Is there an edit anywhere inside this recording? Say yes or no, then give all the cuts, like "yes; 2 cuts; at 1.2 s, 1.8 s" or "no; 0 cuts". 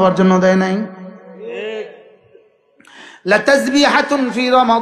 no; 0 cuts